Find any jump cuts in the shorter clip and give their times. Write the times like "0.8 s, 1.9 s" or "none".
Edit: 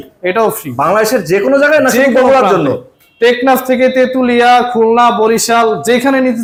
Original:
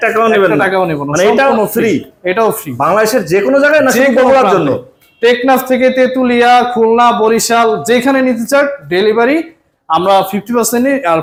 none